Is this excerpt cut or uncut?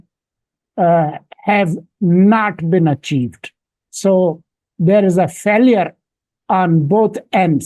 uncut